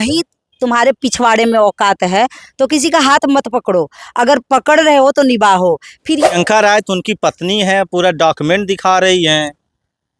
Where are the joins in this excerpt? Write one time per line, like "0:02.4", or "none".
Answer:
0:06.3